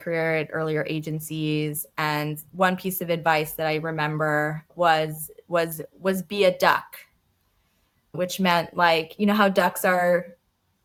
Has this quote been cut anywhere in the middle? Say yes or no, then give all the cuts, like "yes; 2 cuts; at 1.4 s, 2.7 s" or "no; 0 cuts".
no; 0 cuts